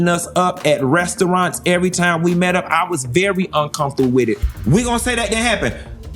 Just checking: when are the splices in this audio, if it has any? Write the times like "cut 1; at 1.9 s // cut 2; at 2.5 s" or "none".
cut 1; at 4.5 s